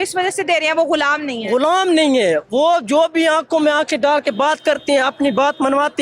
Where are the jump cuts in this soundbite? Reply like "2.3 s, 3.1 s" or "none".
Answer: none

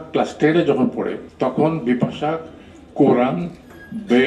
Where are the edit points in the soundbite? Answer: 1.2 s

